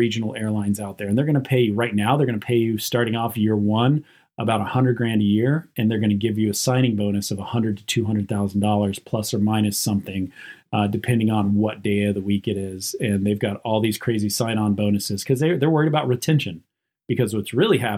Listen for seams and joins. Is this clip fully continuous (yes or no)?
yes